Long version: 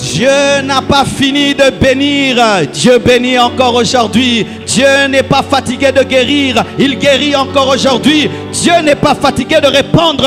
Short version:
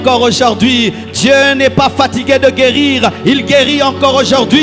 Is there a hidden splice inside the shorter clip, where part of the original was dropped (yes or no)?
no